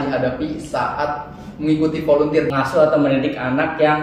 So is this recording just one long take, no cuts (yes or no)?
no